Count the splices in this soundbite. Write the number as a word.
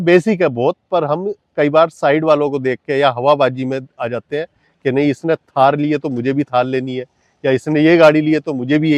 zero